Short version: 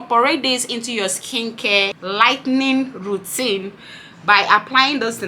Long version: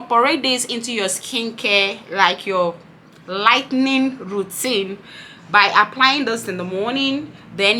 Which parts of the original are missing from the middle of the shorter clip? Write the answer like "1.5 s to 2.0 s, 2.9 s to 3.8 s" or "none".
2.0 s to 3.2 s